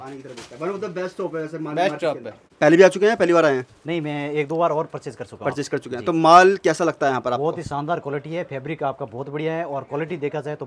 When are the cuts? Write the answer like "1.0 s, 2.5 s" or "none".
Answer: 2.4 s